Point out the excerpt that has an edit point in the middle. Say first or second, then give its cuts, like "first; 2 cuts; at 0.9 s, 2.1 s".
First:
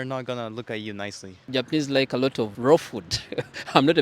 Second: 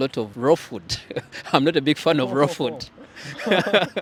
first; 1 cut; at 1.3 s